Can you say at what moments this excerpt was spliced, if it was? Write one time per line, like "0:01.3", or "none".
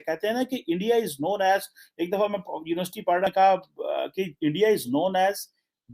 0:03.3